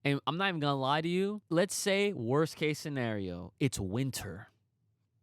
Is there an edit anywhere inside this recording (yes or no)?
yes